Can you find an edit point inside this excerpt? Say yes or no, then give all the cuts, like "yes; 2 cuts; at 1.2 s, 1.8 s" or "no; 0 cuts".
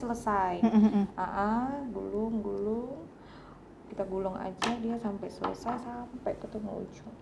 no; 0 cuts